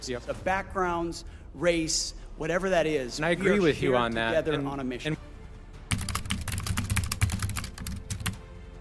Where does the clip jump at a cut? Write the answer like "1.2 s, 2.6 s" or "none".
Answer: 5.2 s